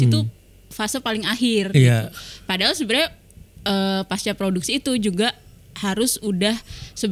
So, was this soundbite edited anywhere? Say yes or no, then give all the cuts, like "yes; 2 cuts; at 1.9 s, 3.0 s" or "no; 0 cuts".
no; 0 cuts